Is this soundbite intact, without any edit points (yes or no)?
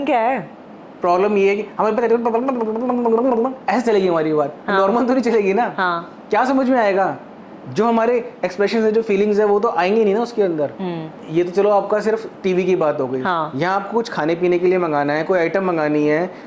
yes